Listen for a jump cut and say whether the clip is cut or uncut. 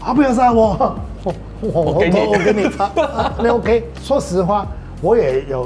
uncut